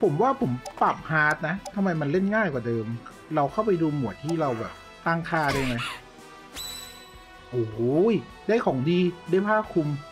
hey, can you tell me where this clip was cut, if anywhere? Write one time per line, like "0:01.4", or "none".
none